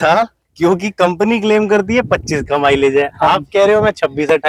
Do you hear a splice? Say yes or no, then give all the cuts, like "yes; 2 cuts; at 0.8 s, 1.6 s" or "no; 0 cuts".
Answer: no; 0 cuts